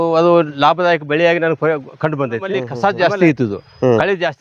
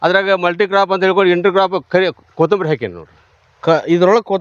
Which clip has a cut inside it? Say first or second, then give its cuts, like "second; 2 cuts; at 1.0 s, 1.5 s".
first; 1 cut; at 2.7 s